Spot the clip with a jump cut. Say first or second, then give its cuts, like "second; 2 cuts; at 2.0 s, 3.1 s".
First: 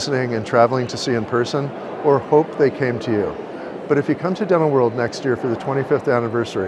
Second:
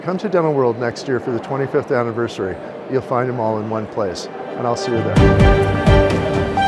second; 1 cut; at 5.1 s